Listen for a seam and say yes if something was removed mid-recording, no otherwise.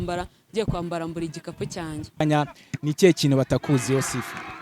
yes